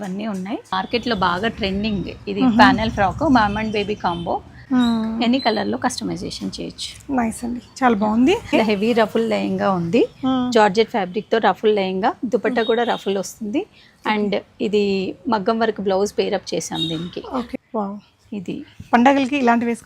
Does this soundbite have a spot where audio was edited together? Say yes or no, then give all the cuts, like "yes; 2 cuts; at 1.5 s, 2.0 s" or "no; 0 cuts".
yes; 4 cuts; at 0.7 s, 4.5 s, 8.5 s, 17.5 s